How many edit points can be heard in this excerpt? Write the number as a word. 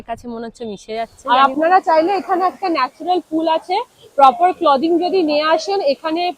one